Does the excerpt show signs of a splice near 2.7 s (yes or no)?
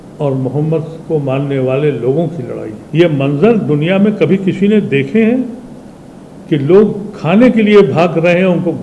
yes